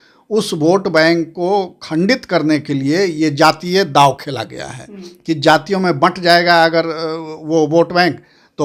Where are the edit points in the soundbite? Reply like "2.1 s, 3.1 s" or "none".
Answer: none